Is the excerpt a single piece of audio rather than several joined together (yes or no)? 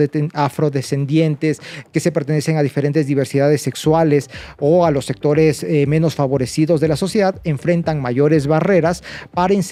yes